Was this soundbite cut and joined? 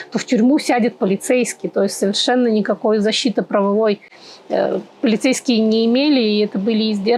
no; 0 cuts

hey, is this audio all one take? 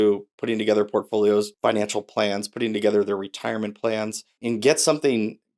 no; 2 cuts; at 1.5 s, 4.4 s

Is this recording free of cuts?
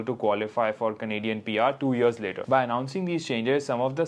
no; 1 cut; at 2.4 s

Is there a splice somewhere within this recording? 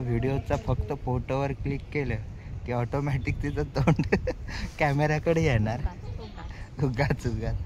no; 0 cuts

